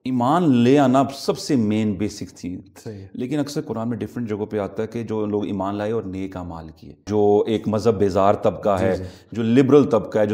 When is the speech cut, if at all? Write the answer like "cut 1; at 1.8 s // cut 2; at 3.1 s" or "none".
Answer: cut 1; at 7.1 s